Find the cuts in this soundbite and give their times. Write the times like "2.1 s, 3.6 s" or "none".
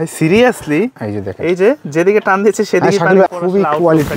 3.3 s